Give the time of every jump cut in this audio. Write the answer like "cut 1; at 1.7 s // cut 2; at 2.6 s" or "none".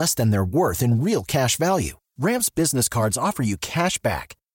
none